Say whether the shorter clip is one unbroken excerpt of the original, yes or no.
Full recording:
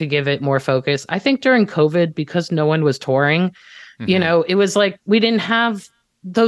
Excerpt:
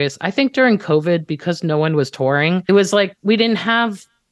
no